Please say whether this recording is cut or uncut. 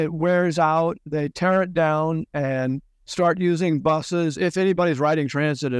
uncut